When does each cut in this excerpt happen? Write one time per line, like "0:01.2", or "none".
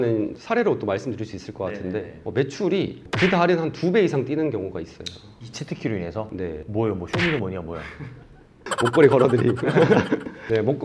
none